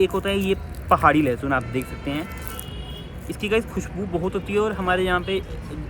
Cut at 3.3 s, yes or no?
no